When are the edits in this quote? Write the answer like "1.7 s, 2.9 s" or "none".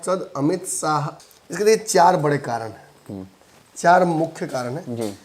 1.2 s